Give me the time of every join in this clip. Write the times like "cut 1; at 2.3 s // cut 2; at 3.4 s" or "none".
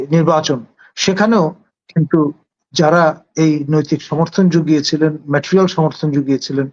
none